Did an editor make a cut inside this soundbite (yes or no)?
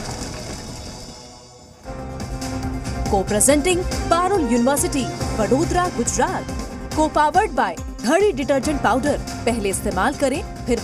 yes